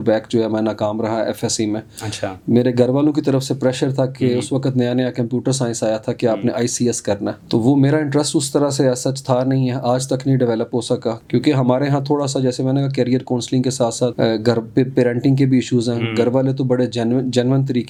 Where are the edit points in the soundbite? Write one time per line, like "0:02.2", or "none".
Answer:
none